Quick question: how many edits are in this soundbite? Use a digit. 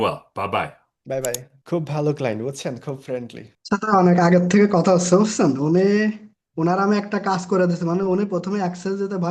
1